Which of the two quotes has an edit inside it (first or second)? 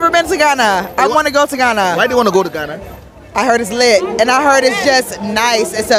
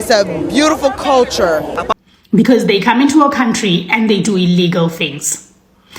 second